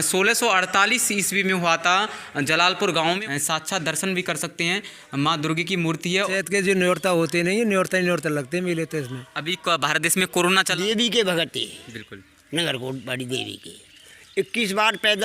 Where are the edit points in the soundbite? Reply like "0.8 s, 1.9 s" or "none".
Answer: 3.2 s, 6.3 s, 10.7 s